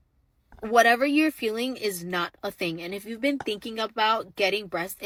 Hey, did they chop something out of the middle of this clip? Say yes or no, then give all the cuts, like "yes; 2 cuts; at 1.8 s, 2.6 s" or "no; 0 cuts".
no; 0 cuts